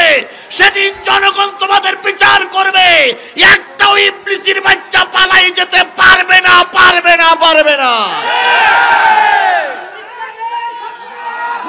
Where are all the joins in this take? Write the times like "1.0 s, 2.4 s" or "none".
none